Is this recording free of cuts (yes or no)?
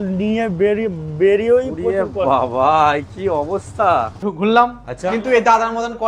no